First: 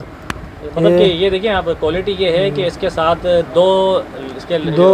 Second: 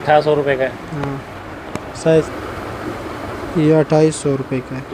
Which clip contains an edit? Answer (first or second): second